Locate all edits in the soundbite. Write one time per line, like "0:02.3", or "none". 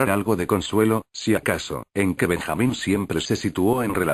none